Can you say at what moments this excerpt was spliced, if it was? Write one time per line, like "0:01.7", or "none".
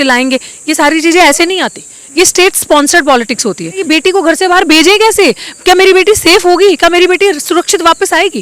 0:03.8